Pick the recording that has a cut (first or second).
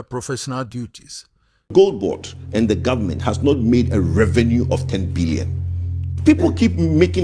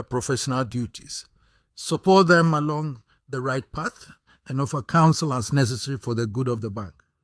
first